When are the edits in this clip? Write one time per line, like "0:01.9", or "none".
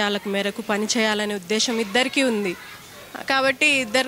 none